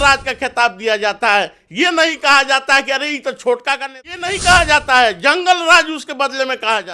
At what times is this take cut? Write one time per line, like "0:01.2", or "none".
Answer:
0:03.9